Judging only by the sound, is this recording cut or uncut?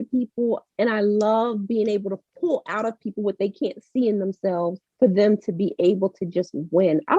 uncut